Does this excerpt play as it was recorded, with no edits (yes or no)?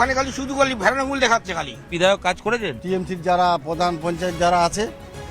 no